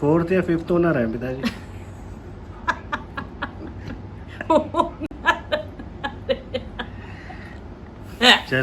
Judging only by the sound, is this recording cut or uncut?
uncut